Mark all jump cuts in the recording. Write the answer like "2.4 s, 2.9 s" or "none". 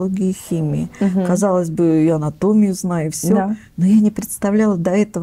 none